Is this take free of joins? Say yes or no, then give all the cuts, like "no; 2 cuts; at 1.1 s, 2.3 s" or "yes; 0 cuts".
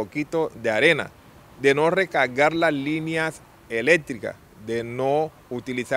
yes; 0 cuts